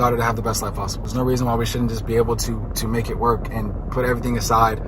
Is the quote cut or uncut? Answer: cut